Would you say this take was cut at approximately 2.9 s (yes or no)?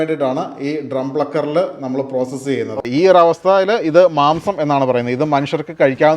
yes